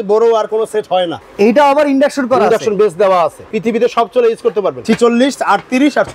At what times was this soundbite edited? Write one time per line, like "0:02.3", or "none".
0:01.2
0:03.4
0:04.8